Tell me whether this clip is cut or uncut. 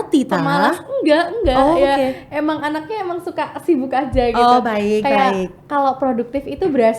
uncut